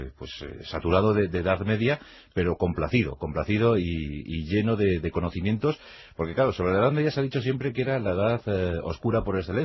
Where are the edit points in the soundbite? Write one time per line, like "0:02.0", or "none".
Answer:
0:07.1